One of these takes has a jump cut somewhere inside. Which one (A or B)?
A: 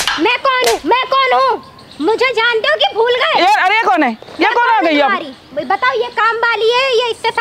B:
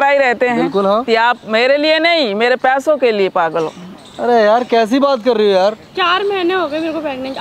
B